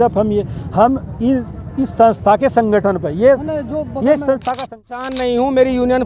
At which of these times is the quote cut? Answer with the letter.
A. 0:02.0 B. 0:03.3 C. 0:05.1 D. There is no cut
C